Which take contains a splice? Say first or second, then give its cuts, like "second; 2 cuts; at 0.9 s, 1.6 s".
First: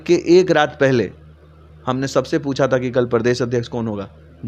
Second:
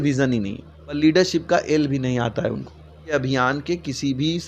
second; 2 cuts; at 1.0 s, 3.1 s